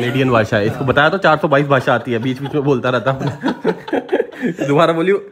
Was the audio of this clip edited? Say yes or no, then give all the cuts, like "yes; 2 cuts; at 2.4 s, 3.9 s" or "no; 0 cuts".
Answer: no; 0 cuts